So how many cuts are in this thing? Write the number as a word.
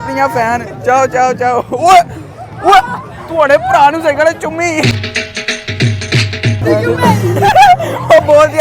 two